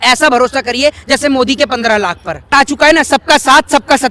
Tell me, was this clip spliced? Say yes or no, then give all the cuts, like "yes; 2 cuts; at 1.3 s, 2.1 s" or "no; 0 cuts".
yes; 1 cut; at 2.5 s